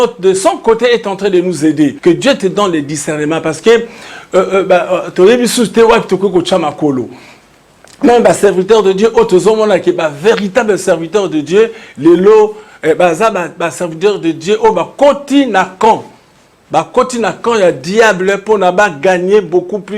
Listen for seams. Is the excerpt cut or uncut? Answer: cut